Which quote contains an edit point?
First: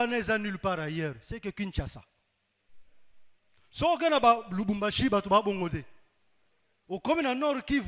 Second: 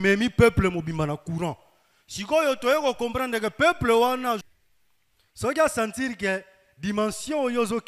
second; 1 cut; at 4.4 s

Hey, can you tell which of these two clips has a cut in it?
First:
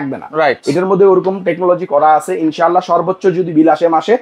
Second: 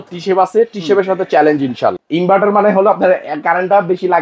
second; 1 cut; at 2.0 s

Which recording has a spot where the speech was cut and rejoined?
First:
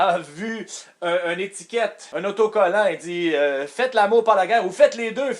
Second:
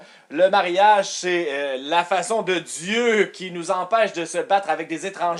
first; 1 cut; at 2.0 s

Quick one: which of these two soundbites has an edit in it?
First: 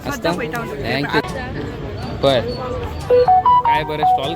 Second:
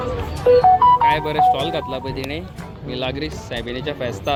first; 1 cut; at 1.3 s

